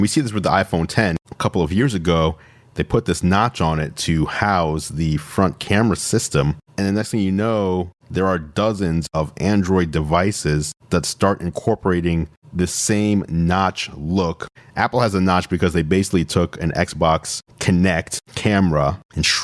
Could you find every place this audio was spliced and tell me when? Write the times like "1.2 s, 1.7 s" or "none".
6.7 s, 9.1 s, 14.5 s

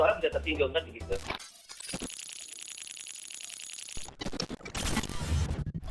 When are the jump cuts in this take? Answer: 1.3 s

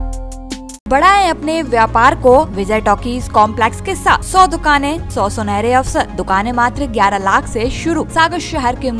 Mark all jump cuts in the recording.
0.9 s, 2.6 s, 4.2 s, 5.0 s, 6.2 s, 8.1 s

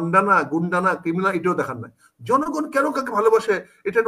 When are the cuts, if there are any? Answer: none

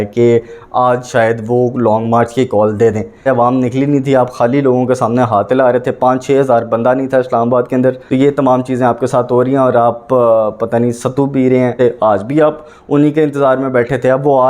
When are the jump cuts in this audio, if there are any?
3.2 s, 8.0 s, 11.8 s

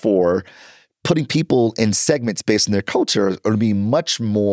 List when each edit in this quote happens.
none

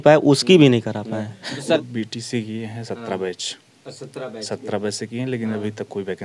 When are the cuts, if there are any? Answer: 1.8 s

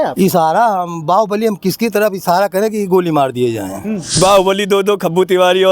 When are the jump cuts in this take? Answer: 4.0 s

